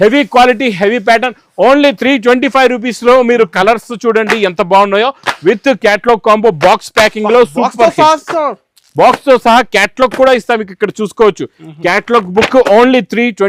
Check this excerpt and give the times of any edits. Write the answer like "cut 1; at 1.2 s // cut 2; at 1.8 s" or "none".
none